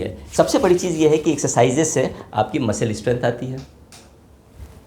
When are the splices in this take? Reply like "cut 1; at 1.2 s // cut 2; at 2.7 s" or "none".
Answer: none